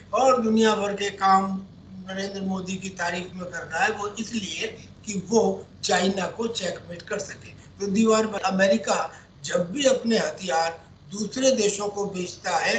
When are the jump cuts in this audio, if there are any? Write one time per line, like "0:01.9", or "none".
0:08.4